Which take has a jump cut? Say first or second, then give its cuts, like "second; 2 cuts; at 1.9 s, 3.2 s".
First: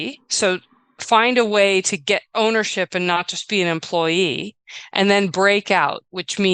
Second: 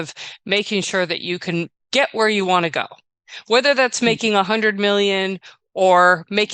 second; 1 cut; at 1.8 s